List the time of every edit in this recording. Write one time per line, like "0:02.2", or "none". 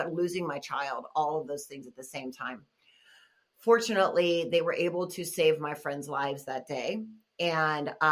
none